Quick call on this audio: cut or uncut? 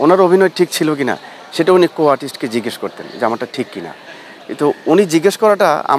uncut